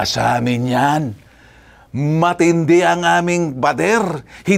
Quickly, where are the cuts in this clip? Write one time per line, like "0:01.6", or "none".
none